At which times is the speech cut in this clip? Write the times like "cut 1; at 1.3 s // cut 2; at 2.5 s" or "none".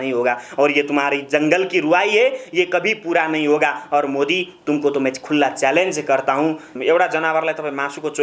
cut 1; at 6.7 s